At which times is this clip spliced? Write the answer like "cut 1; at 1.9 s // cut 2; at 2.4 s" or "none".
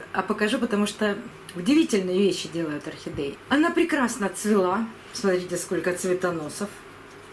cut 1; at 3.4 s